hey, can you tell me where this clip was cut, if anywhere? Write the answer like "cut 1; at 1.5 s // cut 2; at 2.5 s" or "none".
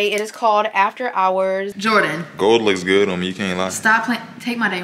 cut 1; at 1.8 s